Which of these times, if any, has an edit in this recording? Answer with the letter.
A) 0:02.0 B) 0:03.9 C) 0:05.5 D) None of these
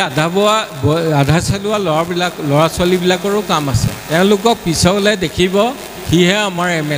B